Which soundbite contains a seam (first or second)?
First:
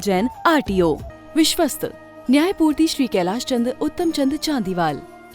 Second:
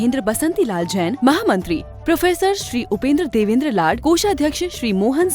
first